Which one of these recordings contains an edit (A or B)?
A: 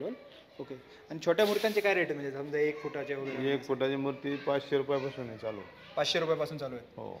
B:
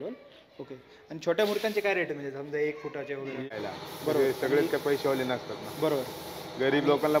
B